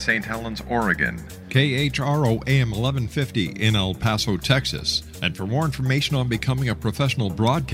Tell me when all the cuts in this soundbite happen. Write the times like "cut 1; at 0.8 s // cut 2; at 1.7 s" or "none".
cut 1; at 1.3 s